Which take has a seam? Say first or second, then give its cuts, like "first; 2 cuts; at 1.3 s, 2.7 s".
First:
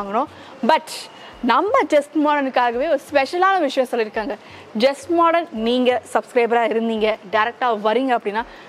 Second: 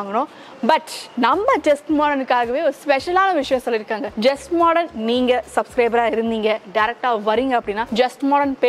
second; 3 cuts; at 1.0 s, 4.0 s, 7.8 s